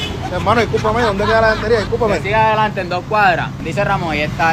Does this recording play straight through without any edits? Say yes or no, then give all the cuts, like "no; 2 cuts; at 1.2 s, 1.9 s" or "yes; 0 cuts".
no; 1 cut; at 3.6 s